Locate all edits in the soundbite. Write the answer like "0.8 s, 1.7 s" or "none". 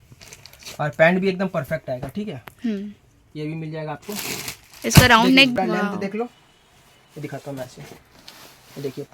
5.5 s